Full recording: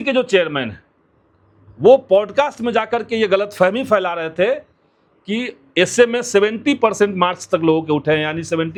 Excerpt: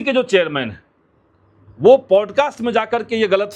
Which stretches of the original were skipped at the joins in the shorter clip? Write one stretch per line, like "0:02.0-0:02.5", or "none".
none